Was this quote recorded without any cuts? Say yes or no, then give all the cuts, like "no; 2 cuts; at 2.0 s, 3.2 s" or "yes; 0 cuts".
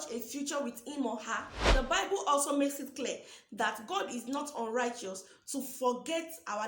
no; 1 cut; at 1.5 s